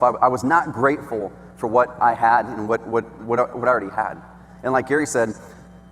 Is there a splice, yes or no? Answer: no